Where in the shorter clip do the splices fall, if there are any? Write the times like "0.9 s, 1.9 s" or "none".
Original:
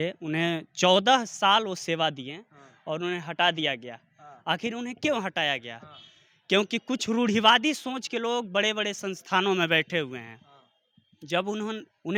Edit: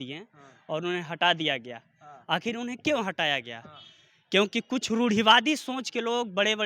none